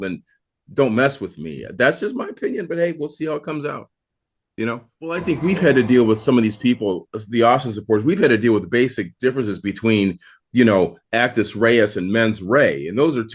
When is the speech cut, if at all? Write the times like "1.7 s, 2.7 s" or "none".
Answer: 5.2 s